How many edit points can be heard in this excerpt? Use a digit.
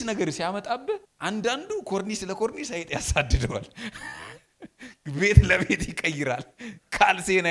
1